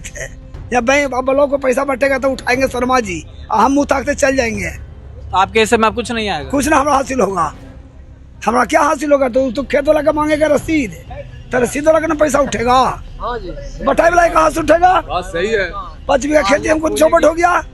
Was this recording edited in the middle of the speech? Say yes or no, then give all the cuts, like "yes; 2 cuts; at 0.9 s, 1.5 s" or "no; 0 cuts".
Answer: no; 0 cuts